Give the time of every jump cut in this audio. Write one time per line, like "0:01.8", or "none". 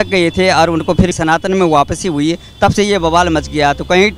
none